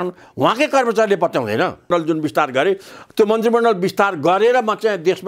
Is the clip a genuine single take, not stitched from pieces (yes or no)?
no